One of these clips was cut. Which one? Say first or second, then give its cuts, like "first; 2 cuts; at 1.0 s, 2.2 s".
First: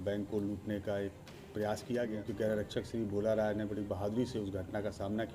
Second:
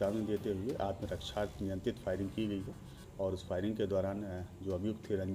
first; 1 cut; at 2.1 s